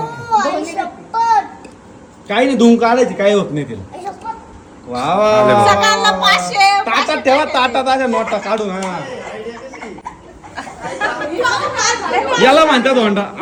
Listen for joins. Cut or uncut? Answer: uncut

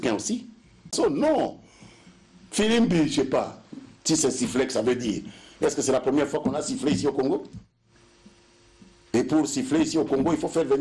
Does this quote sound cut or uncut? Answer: cut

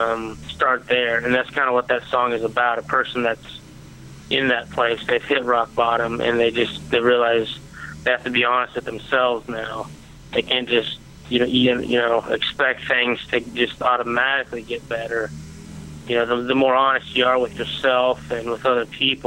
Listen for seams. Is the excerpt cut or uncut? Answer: cut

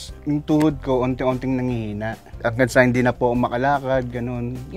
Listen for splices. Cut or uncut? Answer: uncut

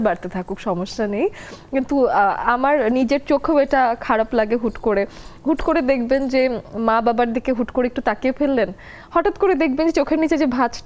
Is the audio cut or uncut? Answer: uncut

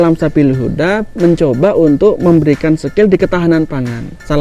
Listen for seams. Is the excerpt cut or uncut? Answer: uncut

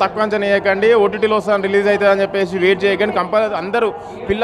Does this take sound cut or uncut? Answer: uncut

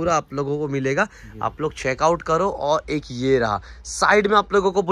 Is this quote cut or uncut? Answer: uncut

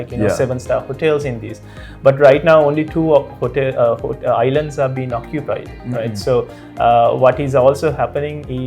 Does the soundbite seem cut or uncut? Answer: uncut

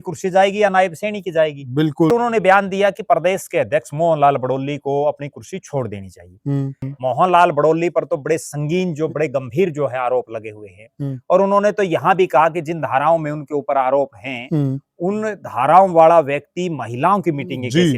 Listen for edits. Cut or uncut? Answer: cut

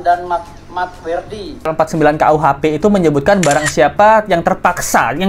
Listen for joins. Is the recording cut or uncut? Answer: cut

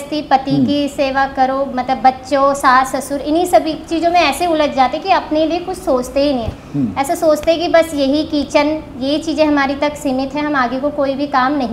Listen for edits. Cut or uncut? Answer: uncut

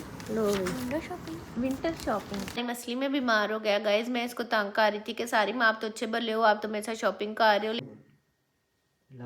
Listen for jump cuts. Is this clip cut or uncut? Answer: cut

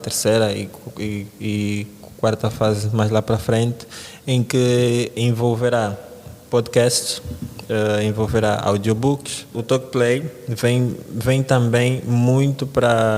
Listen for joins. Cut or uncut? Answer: cut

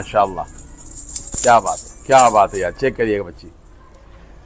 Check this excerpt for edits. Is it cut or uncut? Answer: uncut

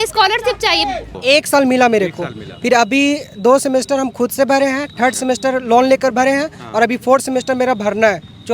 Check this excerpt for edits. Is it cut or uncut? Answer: cut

